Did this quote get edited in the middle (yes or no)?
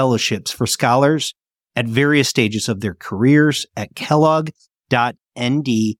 no